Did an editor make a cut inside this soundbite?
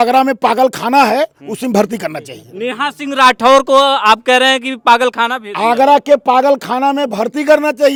no; 0 cuts

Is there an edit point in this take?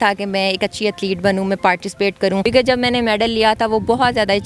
yes; 1 cut; at 2.4 s

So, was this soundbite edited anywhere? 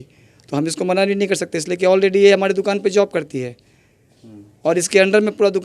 no; 0 cuts

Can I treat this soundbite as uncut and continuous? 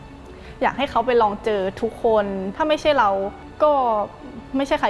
no; 2 cuts; at 2.5 s, 3.4 s

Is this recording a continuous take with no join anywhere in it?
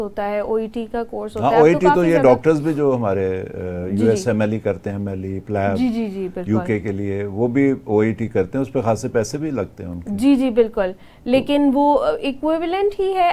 yes; 0 cuts

